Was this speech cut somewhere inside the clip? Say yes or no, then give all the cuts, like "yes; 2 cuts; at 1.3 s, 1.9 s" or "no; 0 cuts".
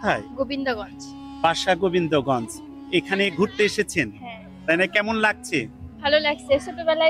no; 0 cuts